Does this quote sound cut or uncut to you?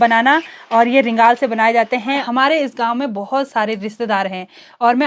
cut